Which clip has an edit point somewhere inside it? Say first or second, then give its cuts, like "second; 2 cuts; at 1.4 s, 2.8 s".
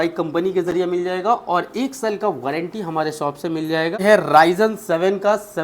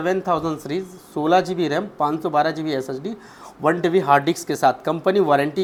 first; 1 cut; at 4.0 s